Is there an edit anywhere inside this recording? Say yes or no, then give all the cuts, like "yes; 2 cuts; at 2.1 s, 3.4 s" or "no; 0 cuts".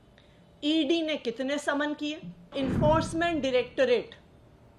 yes; 1 cut; at 2.5 s